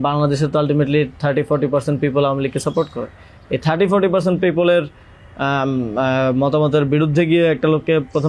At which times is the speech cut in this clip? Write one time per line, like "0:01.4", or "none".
none